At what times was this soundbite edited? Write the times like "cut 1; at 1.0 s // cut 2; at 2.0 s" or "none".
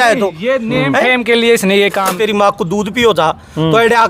cut 1; at 2.1 s